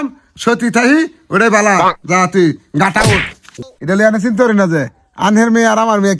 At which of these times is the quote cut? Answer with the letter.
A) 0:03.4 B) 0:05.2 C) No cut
A